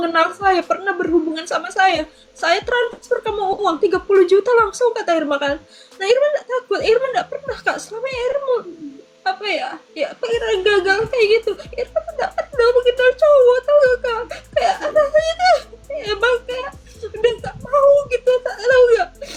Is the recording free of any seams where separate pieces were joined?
yes; 0 cuts

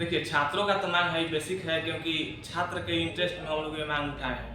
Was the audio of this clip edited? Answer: no; 0 cuts

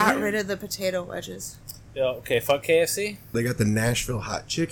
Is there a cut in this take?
yes; 1 cut; at 3.3 s

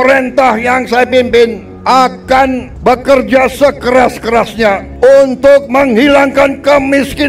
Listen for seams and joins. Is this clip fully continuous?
no; 3 cuts; at 1.7 s, 2.7 s, 4.9 s

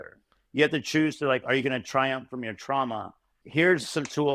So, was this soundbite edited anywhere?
yes; 1 cut; at 3.3 s

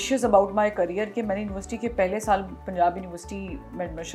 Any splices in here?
no; 0 cuts

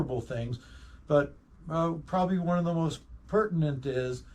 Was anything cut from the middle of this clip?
yes; 1 cut; at 3.0 s

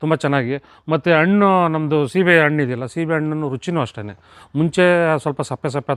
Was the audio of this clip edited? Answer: no; 0 cuts

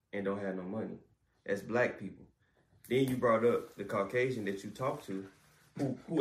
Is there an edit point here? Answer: no; 0 cuts

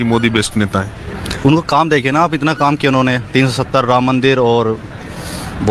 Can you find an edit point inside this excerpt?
no; 0 cuts

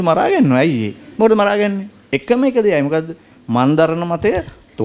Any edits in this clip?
no; 0 cuts

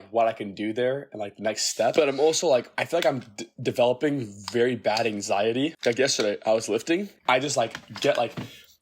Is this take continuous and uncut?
no; 4 cuts; at 1.9 s, 2.7 s, 5.8 s, 7.1 s

